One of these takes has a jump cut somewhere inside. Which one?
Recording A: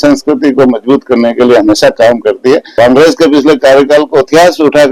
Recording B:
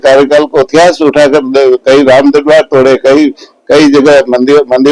A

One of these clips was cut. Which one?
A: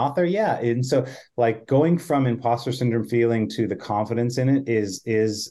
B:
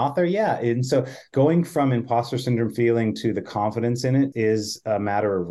B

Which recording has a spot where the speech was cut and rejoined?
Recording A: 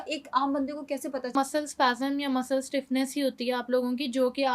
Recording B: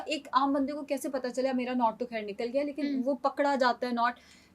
A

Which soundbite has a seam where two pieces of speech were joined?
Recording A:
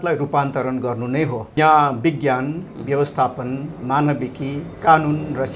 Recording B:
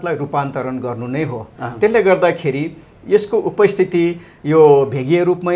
A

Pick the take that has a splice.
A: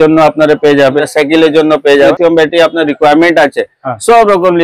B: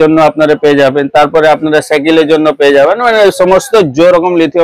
A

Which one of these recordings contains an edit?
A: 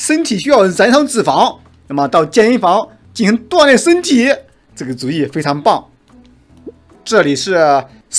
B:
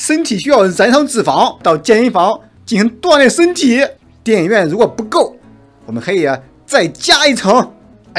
B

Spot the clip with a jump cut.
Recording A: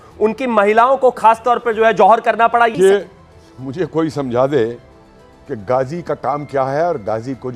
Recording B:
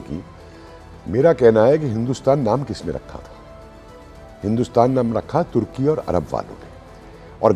A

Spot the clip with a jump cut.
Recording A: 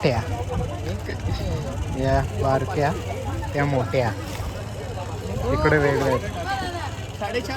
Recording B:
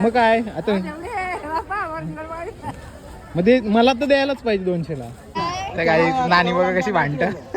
B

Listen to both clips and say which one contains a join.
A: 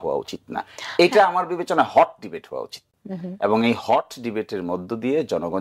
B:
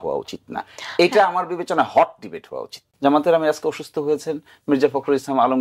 B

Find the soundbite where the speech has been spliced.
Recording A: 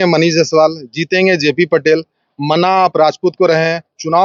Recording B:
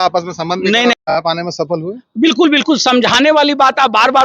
B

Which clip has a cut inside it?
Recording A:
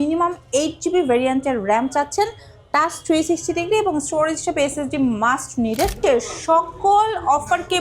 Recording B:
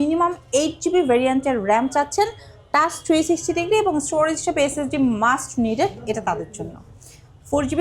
A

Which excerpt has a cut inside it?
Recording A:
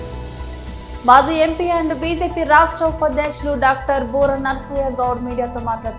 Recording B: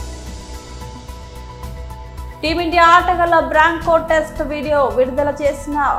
A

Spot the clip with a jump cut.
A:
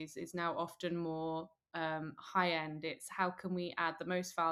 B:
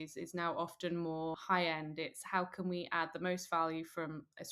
B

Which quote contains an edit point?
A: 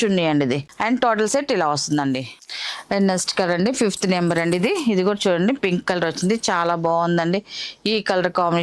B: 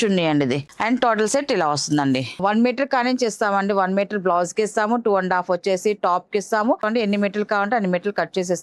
B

